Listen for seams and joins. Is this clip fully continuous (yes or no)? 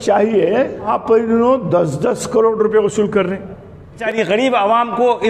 no